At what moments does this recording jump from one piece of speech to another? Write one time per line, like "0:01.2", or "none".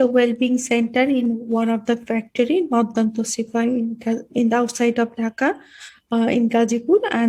none